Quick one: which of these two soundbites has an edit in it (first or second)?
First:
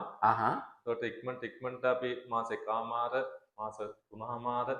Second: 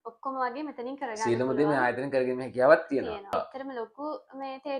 second